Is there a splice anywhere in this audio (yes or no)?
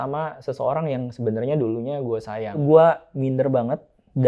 yes